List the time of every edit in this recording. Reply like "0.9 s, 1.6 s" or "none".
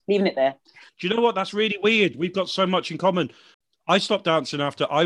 0.8 s, 3.5 s